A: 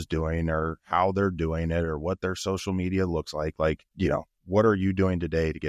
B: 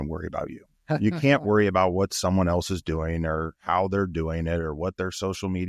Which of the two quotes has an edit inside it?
A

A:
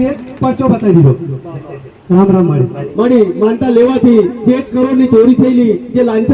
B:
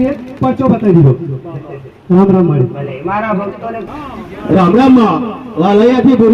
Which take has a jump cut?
A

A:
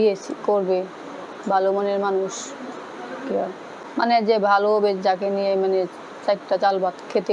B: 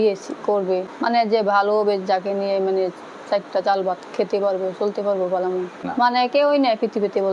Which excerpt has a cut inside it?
B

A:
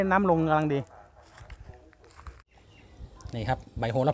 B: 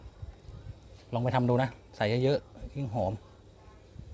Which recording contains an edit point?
A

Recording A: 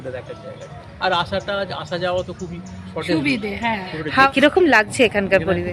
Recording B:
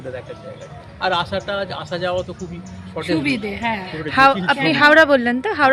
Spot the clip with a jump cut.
A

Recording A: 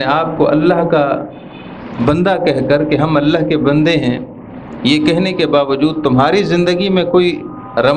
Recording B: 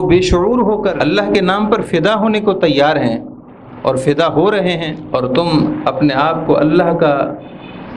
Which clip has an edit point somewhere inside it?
B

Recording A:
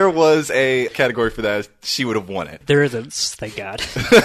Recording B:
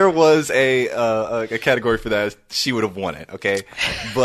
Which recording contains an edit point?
A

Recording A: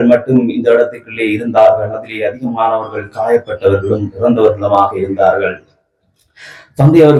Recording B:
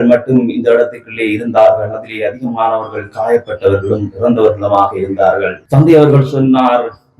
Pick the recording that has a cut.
B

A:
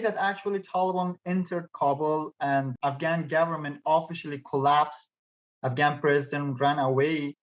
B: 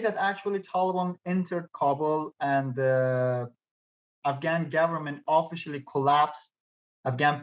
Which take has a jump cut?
A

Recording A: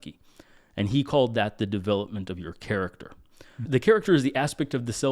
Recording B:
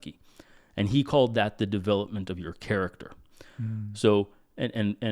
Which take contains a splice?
A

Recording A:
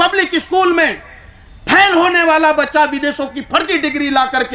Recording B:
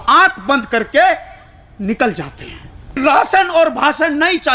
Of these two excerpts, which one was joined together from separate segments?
B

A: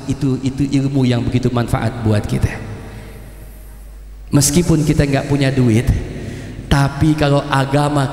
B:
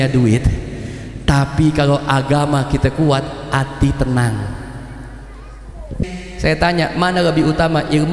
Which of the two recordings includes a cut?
B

